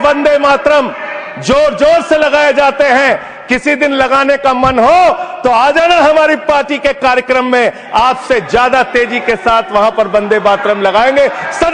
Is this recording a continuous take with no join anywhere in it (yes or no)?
yes